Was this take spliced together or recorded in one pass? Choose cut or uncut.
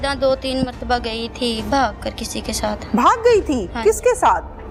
uncut